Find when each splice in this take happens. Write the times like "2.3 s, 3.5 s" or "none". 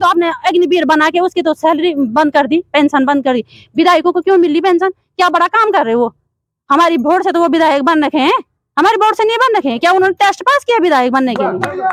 none